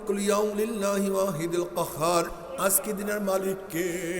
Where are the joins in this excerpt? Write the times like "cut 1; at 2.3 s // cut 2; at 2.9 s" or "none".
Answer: cut 1; at 2.3 s